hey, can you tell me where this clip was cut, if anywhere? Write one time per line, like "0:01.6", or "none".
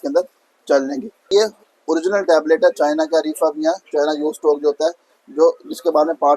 0:01.3